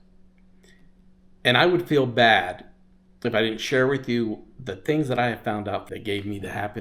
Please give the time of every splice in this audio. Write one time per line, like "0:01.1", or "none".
0:05.9